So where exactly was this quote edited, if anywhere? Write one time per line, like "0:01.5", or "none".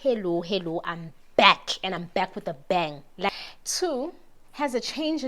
0:03.3